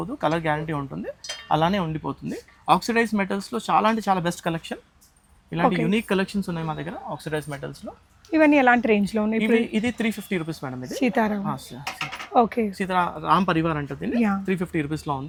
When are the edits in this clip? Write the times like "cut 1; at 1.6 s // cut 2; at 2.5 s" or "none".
none